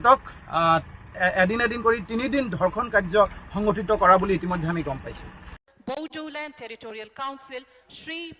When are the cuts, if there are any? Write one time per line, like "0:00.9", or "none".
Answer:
0:05.6